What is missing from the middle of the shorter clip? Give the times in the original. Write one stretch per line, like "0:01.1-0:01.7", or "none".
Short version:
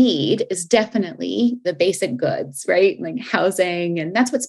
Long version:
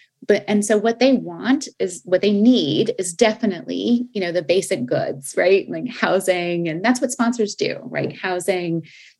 0:04.1-0:04.3

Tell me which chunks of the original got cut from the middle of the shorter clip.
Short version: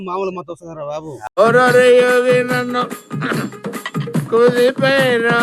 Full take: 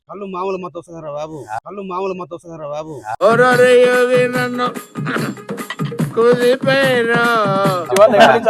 0:01.6-0:03.2

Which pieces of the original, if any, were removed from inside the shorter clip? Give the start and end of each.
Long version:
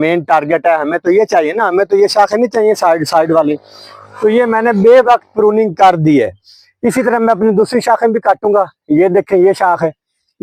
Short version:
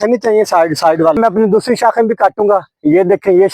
0:03.5-0:07.2

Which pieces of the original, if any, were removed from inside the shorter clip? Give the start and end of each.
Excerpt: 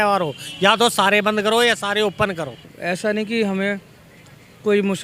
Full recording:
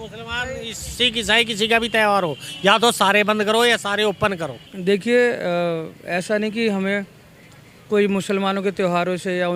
0:04.7-0:05.9

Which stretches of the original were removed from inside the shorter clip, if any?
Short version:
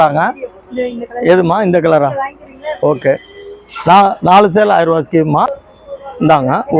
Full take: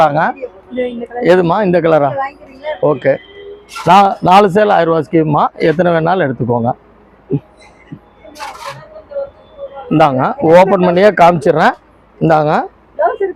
0:05.6-0:09.3

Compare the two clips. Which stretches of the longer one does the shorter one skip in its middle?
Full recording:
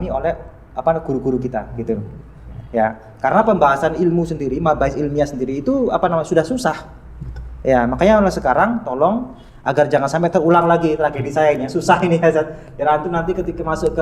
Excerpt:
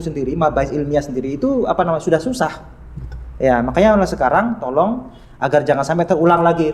none

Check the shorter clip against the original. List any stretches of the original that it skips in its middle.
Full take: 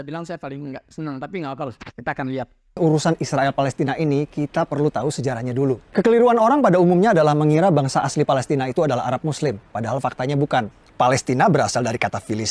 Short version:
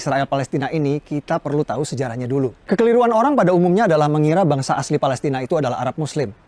none

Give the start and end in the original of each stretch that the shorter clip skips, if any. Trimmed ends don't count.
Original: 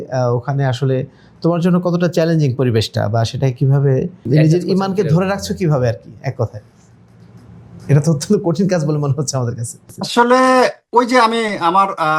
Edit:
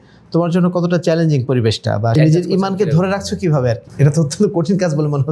0:03.2-0:04.3
0:06.0-0:07.8

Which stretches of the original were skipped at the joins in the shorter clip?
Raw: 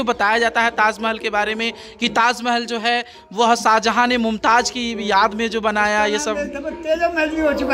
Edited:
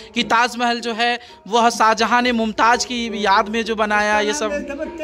none

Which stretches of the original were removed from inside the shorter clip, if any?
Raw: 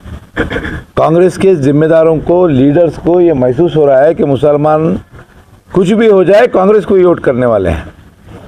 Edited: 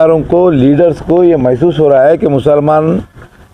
none

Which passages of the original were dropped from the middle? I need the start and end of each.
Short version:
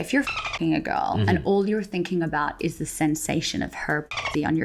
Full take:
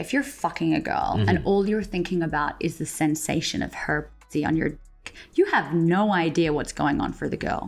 none

